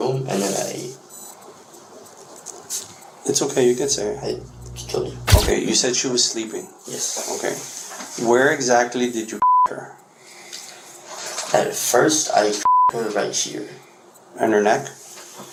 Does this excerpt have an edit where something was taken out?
no; 0 cuts

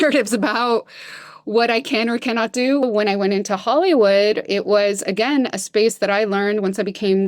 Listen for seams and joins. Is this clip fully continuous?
no; 1 cut; at 2.8 s

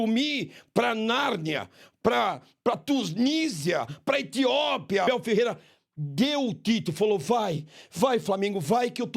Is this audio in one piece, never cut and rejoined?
no; 1 cut; at 5.1 s

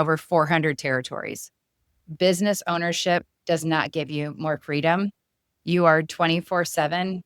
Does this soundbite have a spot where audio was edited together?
yes; 1 cut; at 2.2 s

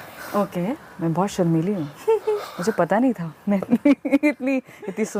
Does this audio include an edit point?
no; 0 cuts

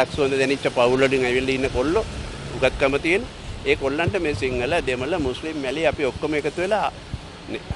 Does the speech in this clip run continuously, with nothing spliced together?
yes; 0 cuts

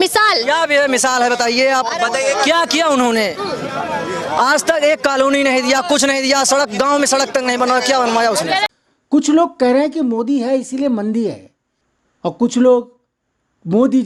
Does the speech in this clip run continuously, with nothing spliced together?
yes; 0 cuts

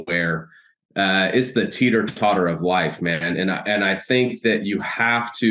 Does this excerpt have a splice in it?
no; 0 cuts

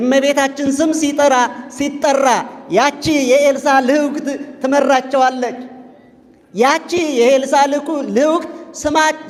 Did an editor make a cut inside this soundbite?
no; 0 cuts

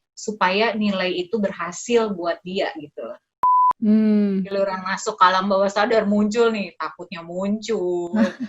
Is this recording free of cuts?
no; 1 cut; at 3.5 s

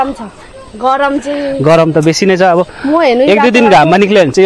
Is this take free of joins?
yes; 0 cuts

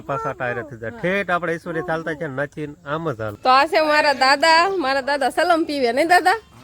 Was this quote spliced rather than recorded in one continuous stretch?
yes; 1 cut; at 3.3 s

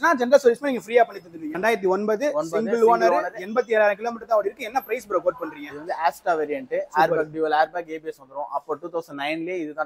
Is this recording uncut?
no; 1 cut; at 1.6 s

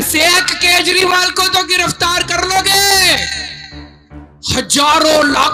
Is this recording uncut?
yes; 0 cuts

